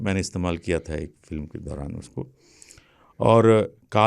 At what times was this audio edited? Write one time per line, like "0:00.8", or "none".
none